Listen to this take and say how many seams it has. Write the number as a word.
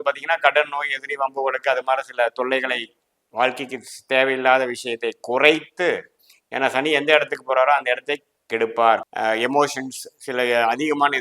one